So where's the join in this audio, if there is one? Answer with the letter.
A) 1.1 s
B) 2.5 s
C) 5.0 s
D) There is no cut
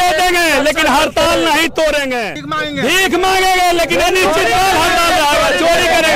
B